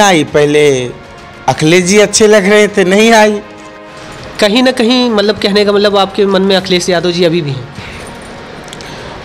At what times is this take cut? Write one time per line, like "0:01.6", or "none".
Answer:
0:04.0